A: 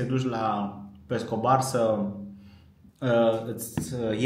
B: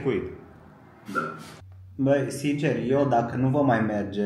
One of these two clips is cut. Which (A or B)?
B